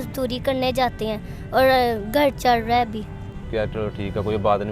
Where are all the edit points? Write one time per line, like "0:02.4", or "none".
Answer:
0:03.4